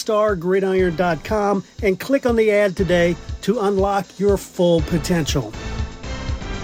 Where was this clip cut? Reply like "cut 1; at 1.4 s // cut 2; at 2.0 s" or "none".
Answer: none